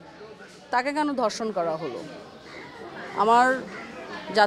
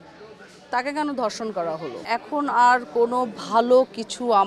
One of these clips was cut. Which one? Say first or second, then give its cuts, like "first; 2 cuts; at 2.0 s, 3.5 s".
second; 1 cut; at 2.0 s